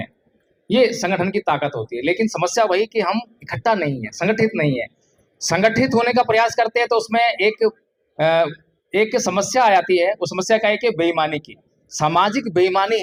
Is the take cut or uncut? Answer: uncut